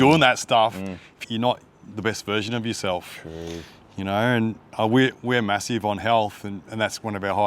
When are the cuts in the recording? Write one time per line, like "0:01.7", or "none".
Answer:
0:01.2

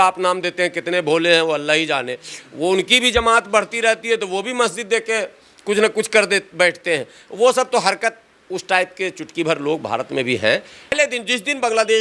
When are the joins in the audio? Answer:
0:10.9

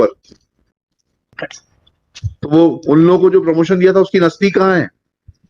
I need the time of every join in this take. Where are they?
0:01.4

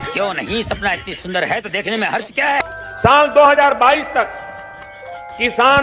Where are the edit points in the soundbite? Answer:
0:02.7

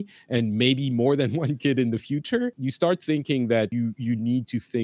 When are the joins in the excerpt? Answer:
0:02.6
0:03.7

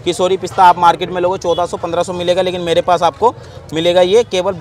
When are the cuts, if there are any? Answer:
none

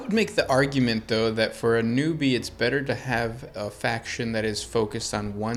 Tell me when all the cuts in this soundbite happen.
none

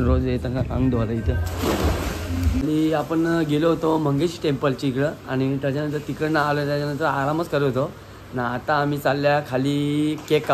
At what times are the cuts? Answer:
0:02.6

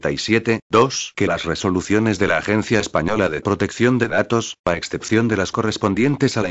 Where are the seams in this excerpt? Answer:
0:01.4
0:04.0
0:04.5

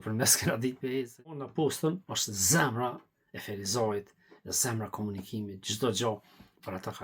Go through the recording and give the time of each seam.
0:01.5

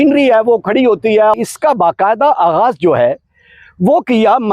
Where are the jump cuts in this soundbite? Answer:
0:01.3

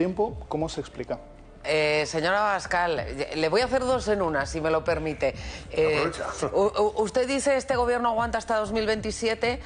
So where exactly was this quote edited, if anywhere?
0:01.6

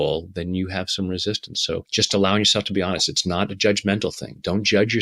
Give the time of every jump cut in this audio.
0:01.9

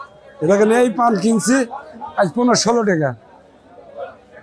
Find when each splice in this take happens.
none

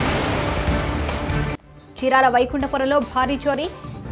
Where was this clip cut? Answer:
0:01.1

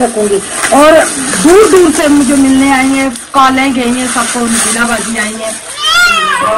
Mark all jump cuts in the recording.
none

